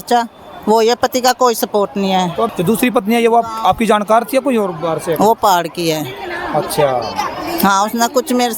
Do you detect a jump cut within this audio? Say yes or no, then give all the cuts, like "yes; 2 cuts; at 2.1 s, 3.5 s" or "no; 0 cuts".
yes; 1 cut; at 2.5 s